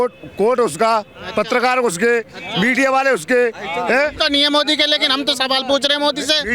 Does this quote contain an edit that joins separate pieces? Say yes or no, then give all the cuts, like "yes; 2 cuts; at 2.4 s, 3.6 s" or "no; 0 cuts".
no; 0 cuts